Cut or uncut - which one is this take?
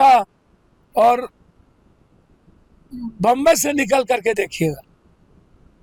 uncut